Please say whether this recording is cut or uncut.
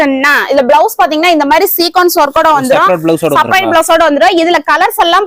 uncut